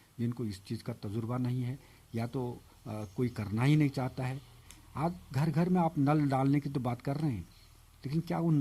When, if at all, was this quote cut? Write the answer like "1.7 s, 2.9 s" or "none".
4.6 s